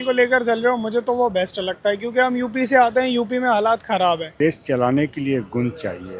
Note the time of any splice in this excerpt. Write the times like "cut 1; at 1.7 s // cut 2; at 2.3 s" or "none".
cut 1; at 4.3 s